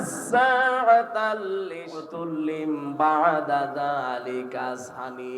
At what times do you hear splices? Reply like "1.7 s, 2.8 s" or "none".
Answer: 2.1 s

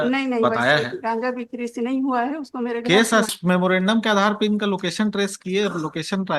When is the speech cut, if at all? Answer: 3.3 s

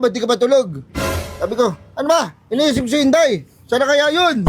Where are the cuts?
none

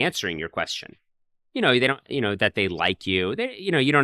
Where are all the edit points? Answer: none

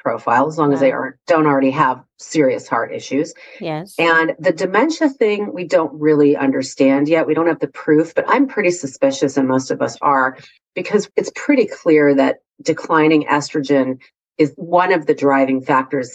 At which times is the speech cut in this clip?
11.1 s, 14.5 s

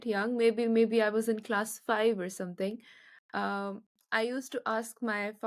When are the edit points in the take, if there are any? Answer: none

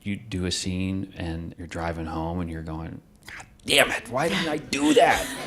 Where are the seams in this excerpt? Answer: 1.6 s

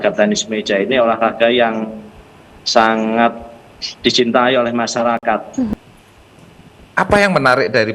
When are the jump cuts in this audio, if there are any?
5.7 s

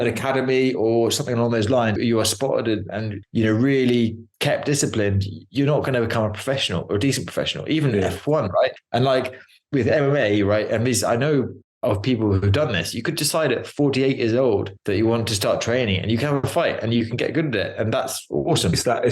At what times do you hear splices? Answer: 2.0 s, 9.3 s

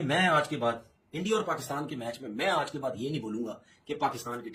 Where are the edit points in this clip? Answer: none

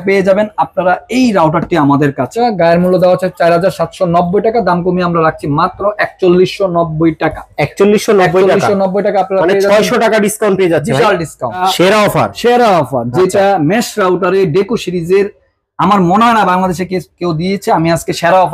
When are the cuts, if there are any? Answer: 2.3 s, 11.6 s

